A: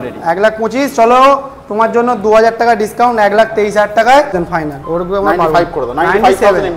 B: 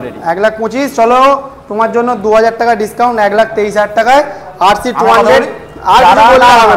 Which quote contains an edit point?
A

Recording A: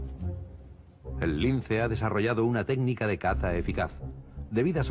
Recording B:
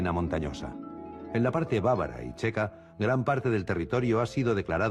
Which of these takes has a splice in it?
B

